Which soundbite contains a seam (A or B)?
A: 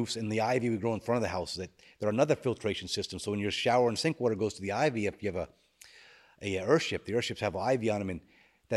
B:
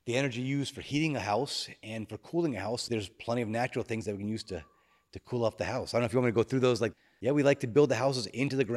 B